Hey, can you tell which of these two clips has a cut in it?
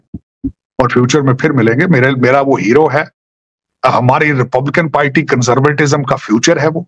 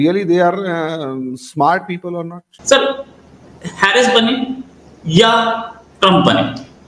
second; 1 cut; at 2.6 s

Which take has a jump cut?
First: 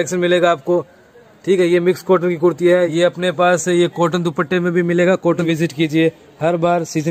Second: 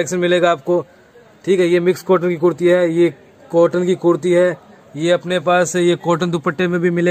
first; 2 cuts; at 2.9 s, 5.5 s

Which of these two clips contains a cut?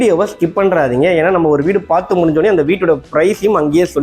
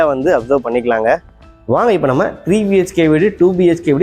second; 1 cut; at 1.5 s

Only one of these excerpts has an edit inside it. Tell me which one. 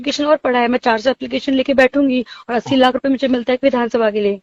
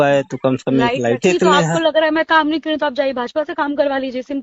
second; 1 cut; at 1.2 s

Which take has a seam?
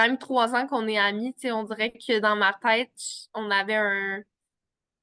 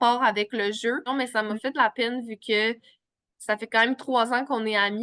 second; 1 cut; at 1.0 s

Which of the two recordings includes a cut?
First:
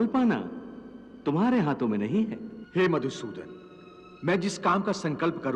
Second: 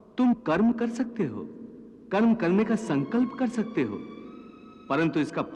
first; 1 cut; at 2.5 s

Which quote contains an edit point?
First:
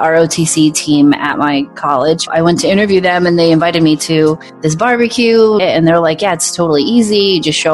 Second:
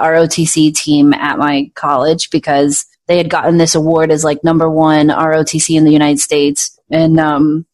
first; 2 cuts; at 2.3 s, 5.6 s

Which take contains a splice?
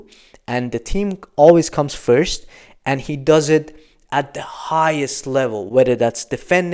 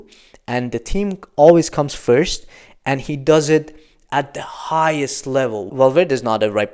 second; 1 cut; at 5.7 s

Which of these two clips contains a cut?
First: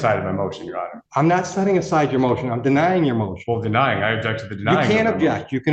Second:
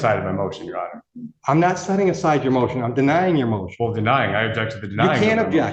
first; 1 cut; at 1.0 s

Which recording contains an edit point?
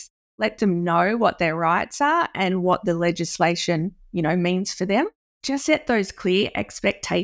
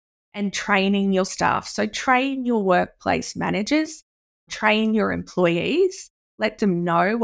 first; 1 cut; at 5.5 s

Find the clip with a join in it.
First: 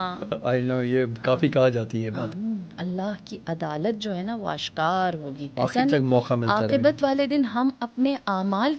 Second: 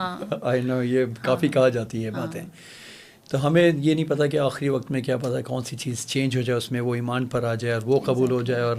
first; 2 cuts; at 2.3 s, 5.4 s

